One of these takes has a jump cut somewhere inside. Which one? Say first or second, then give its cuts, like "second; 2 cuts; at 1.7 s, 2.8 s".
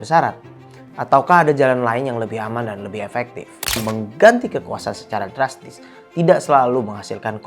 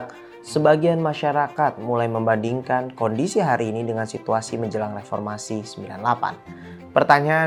first; 1 cut; at 3.8 s